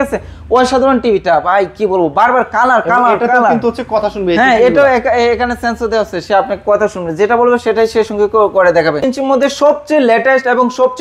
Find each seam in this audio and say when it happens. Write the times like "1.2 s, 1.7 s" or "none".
9.0 s